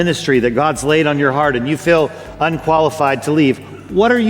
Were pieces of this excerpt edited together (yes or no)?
no